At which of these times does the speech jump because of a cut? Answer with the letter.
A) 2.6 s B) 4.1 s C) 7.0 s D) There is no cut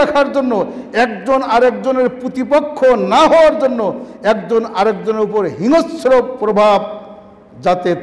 D